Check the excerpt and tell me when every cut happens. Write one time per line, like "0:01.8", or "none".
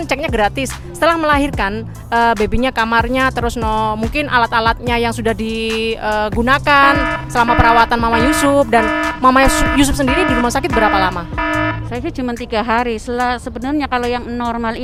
none